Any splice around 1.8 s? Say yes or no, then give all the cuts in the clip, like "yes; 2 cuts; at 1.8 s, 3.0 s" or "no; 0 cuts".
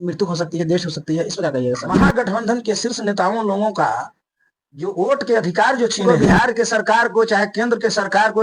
yes; 2 cuts; at 1.8 s, 6.0 s